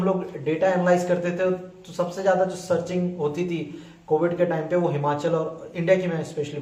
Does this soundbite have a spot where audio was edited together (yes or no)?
no